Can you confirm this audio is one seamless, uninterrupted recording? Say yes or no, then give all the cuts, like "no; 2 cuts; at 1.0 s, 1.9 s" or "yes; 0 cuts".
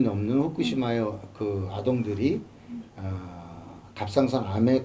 yes; 0 cuts